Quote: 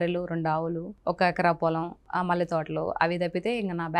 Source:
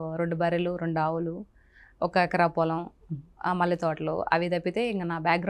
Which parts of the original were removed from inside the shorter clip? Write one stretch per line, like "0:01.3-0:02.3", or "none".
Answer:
0:01.4-0:01.8
0:02.9-0:03.3